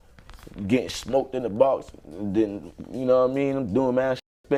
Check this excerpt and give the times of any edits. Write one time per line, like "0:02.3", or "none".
none